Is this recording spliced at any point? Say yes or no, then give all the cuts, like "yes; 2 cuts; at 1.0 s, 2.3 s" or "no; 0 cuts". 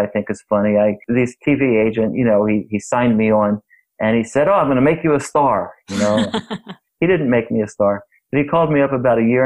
yes; 2 cuts; at 1.0 s, 6.9 s